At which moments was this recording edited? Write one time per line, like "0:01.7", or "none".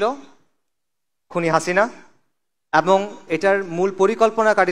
none